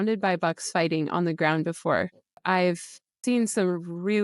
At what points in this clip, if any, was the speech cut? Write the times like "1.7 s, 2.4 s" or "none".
2.3 s, 3.2 s